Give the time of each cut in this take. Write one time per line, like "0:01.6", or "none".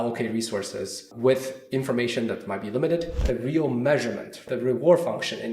0:01.1
0:03.2
0:04.3